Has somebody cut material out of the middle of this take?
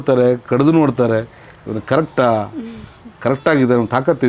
no; 0 cuts

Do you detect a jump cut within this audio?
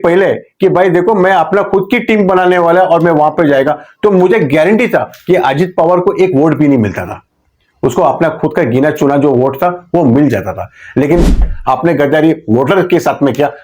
yes; 1 cut; at 11.5 s

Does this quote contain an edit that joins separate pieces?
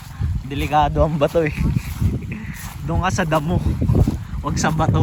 no; 0 cuts

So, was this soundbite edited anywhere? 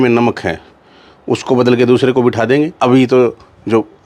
yes; 1 cut; at 2.7 s

